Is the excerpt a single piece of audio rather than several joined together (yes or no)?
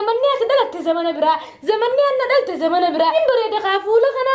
no